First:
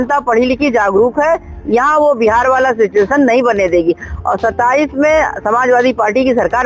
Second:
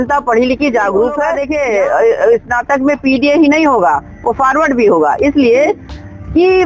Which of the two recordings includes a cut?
second; 1 cut; at 1.4 s

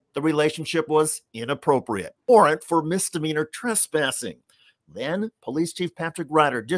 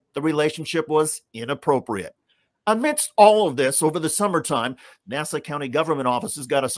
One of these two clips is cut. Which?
first; 1 cut; at 2.3 s

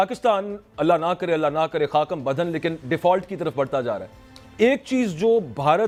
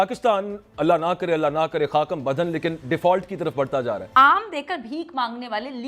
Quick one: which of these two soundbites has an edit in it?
second; 1 cut; at 4.2 s

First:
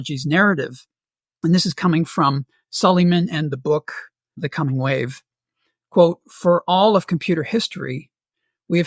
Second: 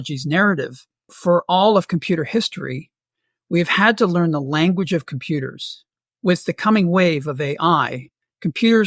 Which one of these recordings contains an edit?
second; 1 cut; at 1.1 s

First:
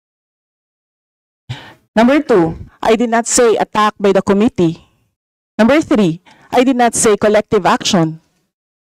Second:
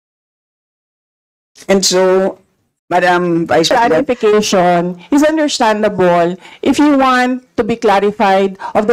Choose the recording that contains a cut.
second; 1 cut; at 3.7 s

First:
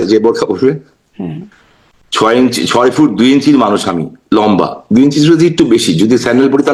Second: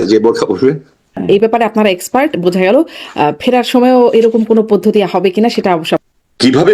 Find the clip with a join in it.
second; 2 cuts; at 1.2 s, 6.0 s

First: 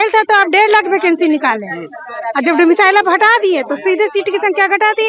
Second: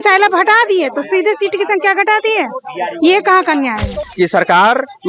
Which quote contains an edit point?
second; 1 cut; at 4.0 s

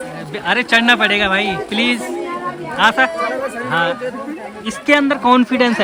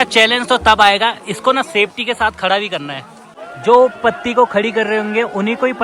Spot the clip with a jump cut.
second; 1 cut; at 3.5 s

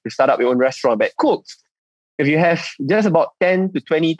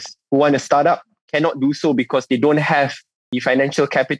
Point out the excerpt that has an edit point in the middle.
second; 1 cut; at 3.3 s

